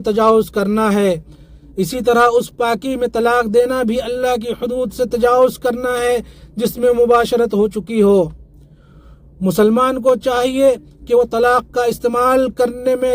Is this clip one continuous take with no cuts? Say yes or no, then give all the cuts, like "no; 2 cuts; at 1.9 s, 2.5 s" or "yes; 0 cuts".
yes; 0 cuts